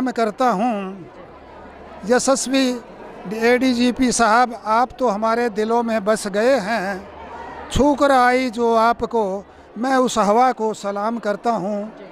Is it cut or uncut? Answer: uncut